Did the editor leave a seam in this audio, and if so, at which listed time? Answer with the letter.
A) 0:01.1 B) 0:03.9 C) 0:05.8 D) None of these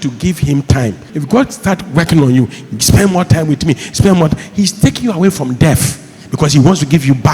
A